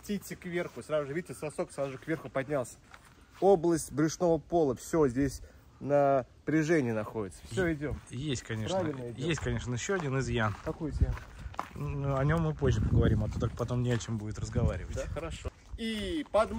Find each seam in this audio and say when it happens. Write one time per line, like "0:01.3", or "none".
none